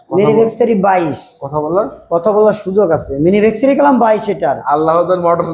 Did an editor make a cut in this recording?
no; 0 cuts

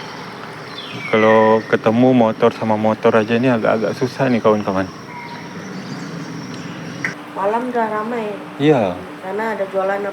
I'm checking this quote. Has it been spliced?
yes; 1 cut; at 7.1 s

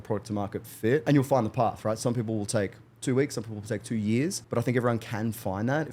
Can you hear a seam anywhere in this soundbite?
yes; 2 cuts; at 1.0 s, 4.4 s

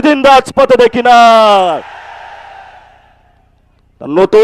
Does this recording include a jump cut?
no; 0 cuts

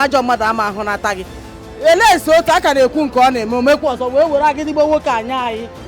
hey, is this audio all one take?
yes; 0 cuts

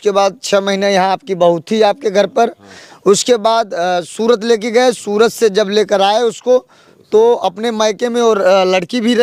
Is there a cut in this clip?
no; 0 cuts

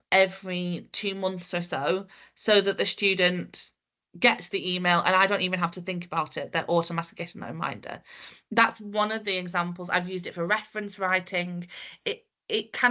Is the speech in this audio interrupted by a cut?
no; 0 cuts

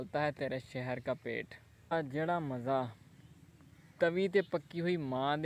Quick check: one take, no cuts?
no; 1 cut; at 2.2 s

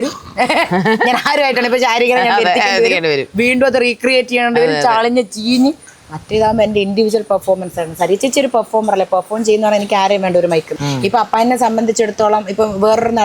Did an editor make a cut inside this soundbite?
yes; 1 cut; at 10.7 s

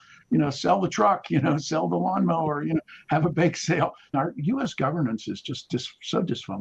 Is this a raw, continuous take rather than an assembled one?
no; 1 cut; at 4.1 s

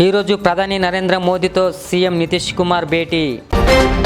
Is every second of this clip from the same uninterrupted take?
yes; 0 cuts

